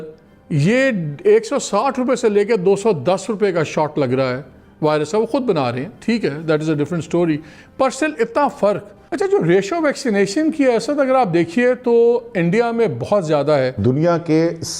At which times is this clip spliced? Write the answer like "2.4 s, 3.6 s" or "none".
9.1 s, 13.7 s